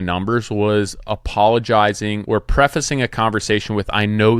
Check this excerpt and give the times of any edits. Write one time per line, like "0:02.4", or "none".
0:02.2